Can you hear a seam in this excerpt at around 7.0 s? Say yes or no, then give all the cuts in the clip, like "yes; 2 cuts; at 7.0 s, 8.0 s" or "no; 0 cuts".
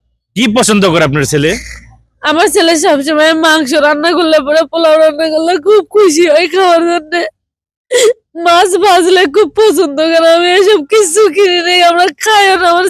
no; 0 cuts